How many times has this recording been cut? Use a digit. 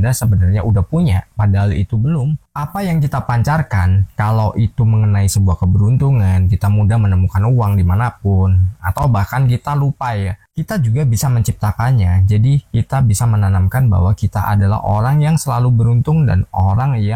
2